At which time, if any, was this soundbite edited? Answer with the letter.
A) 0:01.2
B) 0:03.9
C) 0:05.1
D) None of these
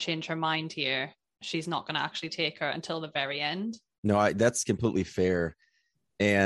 B